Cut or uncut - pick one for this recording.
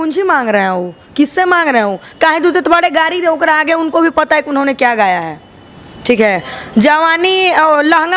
uncut